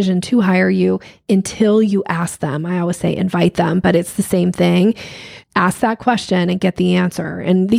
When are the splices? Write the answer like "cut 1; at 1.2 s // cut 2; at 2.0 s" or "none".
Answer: cut 1; at 5.3 s